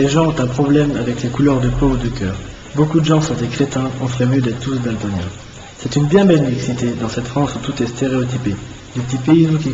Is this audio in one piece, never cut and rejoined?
no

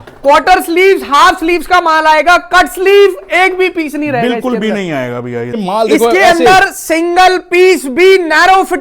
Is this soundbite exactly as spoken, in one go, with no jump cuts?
no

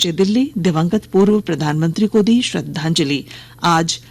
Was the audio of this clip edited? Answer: no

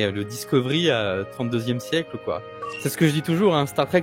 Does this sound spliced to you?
yes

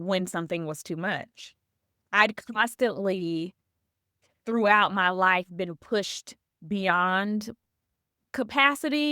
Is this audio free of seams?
yes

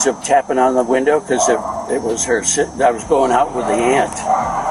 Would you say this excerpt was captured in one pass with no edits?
yes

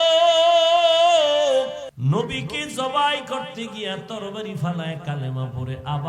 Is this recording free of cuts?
no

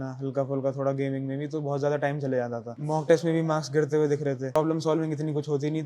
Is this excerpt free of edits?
no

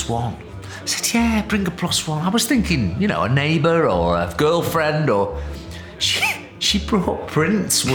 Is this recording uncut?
yes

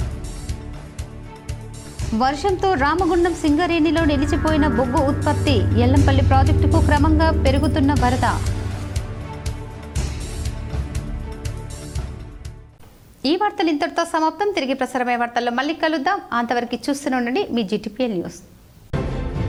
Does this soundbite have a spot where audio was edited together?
no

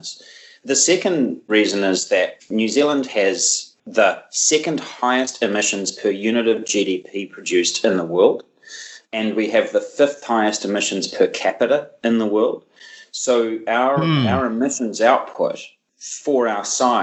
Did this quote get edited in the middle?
no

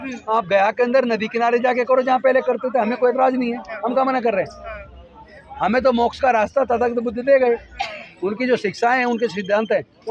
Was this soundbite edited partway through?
no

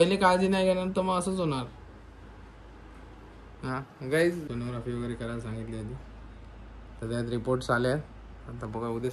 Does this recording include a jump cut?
yes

